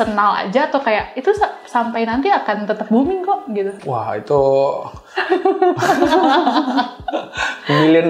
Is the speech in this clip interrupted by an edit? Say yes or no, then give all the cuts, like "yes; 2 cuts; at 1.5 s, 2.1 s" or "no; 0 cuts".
no; 0 cuts